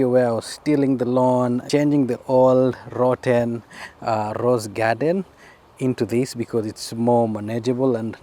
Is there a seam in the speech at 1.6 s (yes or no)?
yes